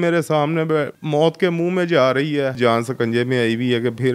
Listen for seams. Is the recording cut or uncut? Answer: cut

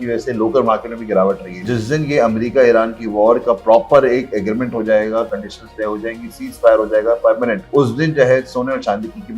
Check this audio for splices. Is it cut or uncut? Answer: cut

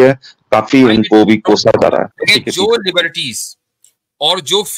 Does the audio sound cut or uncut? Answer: cut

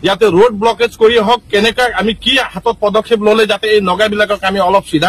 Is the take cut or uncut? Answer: uncut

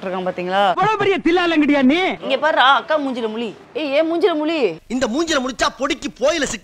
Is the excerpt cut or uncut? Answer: cut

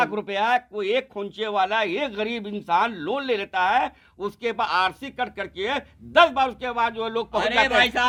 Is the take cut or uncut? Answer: uncut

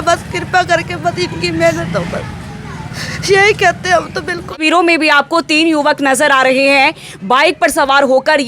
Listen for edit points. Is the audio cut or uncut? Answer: cut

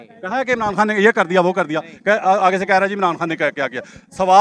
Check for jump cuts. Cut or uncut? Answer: uncut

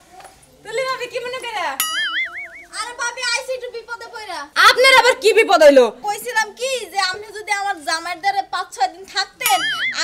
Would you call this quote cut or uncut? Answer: cut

